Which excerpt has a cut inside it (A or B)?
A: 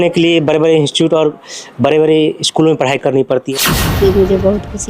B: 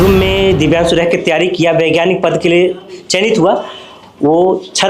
A